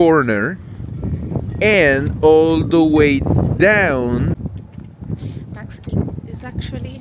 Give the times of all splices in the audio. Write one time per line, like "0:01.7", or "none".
0:04.3